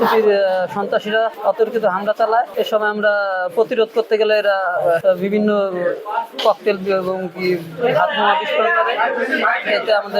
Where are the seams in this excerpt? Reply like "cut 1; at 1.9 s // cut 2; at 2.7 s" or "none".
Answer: cut 1; at 1.4 s // cut 2; at 2.5 s // cut 3; at 5.0 s